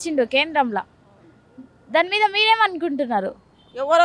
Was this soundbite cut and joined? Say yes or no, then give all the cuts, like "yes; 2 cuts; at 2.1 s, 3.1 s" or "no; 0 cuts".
no; 0 cuts